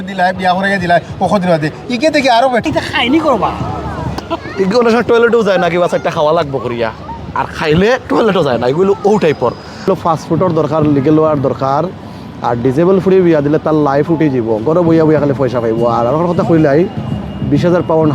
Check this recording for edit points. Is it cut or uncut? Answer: cut